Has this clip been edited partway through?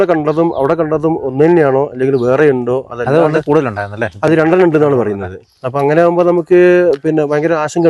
no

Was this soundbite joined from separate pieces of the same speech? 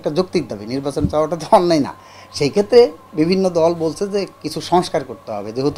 no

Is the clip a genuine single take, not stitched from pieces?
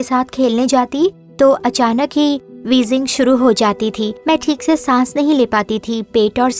yes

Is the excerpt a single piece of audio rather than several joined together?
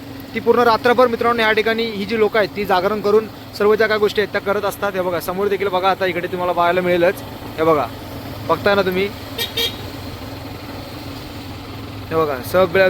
yes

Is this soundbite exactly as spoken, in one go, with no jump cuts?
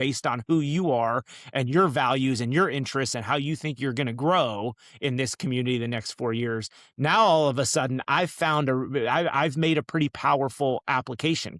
yes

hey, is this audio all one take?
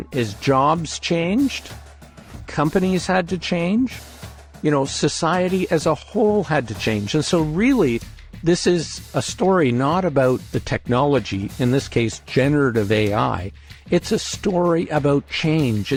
yes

